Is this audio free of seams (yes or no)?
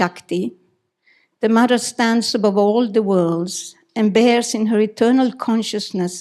yes